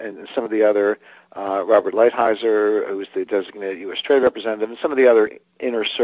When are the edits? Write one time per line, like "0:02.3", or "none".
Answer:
0:04.2